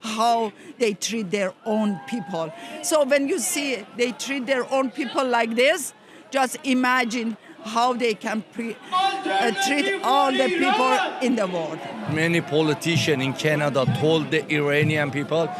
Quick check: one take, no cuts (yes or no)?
yes